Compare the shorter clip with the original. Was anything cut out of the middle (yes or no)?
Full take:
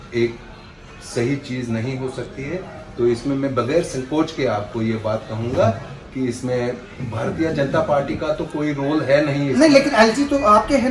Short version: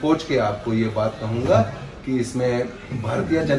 no